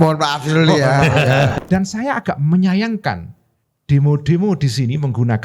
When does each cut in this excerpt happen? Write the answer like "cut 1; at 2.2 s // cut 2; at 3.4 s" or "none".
cut 1; at 1.6 s

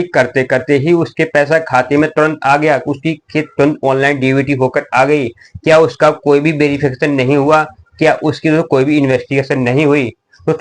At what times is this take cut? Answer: none

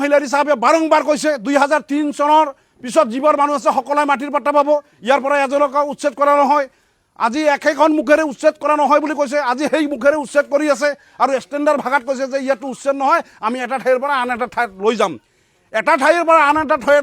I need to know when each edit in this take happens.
none

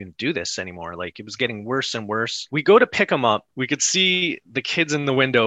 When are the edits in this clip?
cut 1; at 2.4 s // cut 2; at 3.5 s

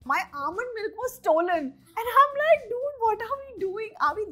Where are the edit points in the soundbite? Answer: none

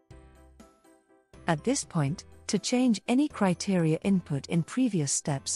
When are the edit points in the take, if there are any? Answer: cut 1; at 1.5 s

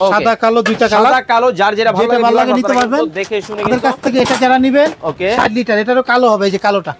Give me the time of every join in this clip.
none

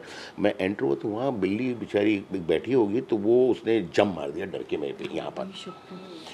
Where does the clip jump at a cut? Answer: none

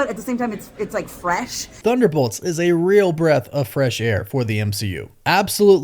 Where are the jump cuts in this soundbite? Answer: cut 1; at 1.8 s

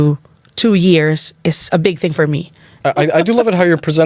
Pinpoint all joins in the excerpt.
cut 1; at 2.8 s

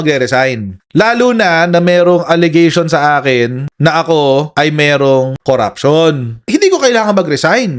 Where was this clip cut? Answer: cut 1; at 6.4 s

